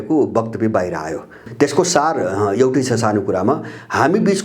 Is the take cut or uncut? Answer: cut